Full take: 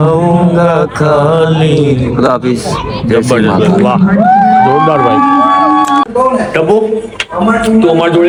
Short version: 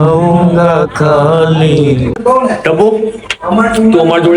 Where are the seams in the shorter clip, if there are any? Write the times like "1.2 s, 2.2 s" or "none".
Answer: 2.2 s